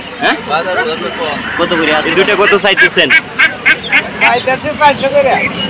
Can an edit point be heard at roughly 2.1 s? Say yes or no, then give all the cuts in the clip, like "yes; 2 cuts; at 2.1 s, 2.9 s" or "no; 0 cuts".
yes; 1 cut; at 2.1 s